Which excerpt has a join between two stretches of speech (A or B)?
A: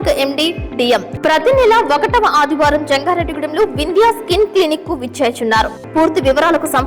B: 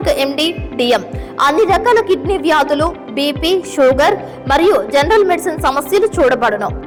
A